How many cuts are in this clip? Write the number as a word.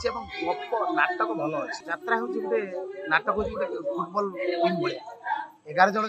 one